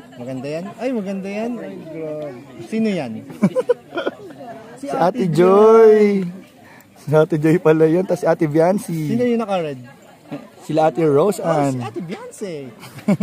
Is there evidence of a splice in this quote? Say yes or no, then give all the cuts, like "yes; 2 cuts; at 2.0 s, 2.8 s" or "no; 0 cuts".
no; 0 cuts